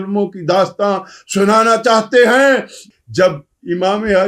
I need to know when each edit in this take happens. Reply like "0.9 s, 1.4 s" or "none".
2.8 s